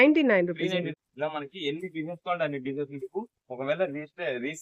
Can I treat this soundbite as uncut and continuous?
no; 1 cut; at 0.9 s

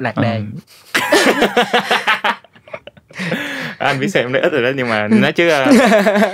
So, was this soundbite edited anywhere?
no; 0 cuts

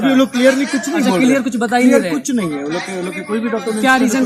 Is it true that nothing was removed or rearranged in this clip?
yes; 0 cuts

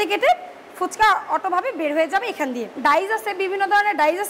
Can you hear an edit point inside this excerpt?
yes; 1 cut; at 2.7 s

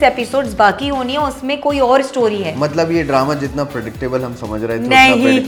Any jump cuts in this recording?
no; 0 cuts

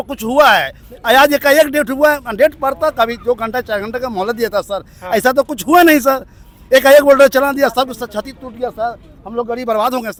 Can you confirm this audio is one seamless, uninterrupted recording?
yes; 0 cuts

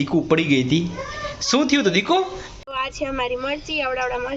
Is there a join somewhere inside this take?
yes; 1 cut; at 2.6 s

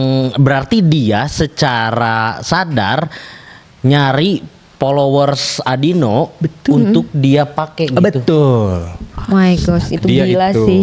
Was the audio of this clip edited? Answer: no; 0 cuts

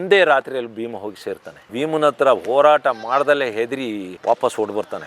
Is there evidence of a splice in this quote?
yes; 1 cut; at 1.6 s

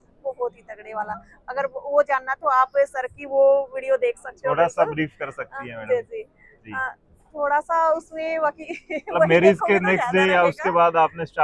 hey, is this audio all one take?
yes; 0 cuts

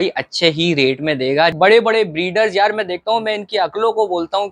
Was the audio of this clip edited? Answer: yes; 1 cut; at 1.5 s

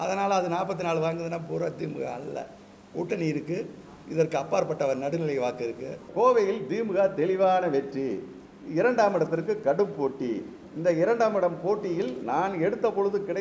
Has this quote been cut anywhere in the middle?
yes; 1 cut; at 6.0 s

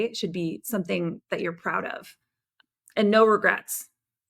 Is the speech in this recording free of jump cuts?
no; 1 cut; at 2.5 s

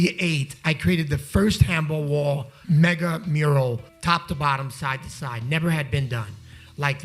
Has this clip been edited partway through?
yes; 2 cuts; at 2.5 s, 3.9 s

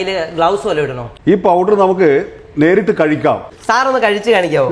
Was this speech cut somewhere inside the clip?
yes; 2 cuts; at 1.1 s, 3.5 s

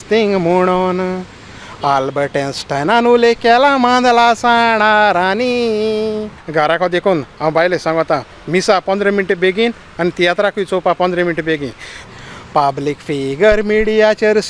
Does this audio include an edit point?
yes; 2 cuts; at 6.4 s, 12.0 s

